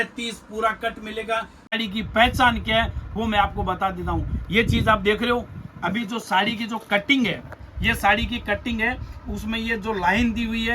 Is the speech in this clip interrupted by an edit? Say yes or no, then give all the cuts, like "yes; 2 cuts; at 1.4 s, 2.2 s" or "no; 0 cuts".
yes; 1 cut; at 1.7 s